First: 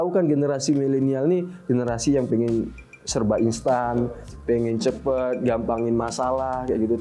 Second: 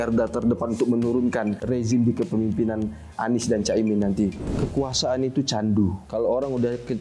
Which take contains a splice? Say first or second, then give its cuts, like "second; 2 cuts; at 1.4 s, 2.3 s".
second; 3 cuts; at 1.6 s, 4.5 s, 6.0 s